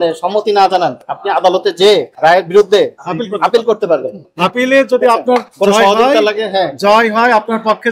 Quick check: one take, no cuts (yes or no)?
no